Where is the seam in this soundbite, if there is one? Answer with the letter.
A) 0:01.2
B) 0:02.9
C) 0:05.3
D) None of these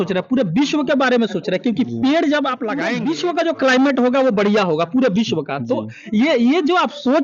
B